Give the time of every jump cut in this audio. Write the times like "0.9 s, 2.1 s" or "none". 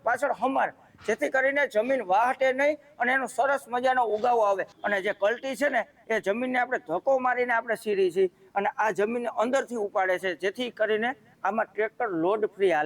4.7 s